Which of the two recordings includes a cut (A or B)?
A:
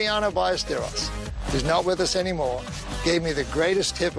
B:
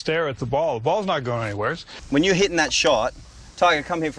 B